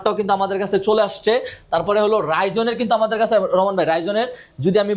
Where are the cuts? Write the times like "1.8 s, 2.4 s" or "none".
none

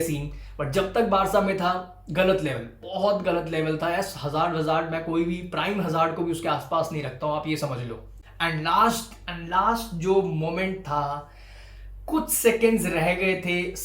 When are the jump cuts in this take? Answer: 8.1 s

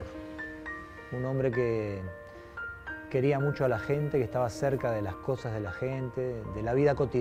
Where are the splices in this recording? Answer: none

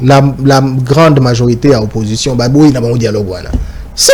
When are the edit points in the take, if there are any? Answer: none

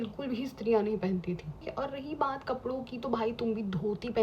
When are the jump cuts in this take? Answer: 1.7 s

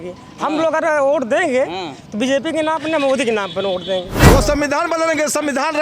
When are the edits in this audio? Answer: 4.2 s

